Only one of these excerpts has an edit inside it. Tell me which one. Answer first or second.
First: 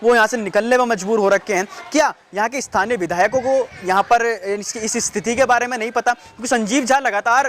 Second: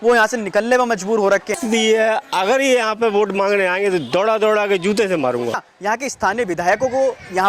second